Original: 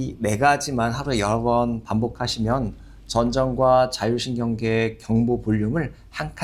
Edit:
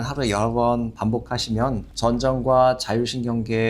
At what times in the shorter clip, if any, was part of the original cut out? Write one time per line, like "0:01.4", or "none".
0:01.9